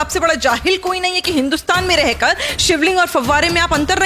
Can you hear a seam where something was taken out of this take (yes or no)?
no